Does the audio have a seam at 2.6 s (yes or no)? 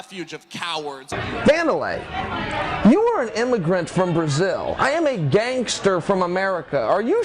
no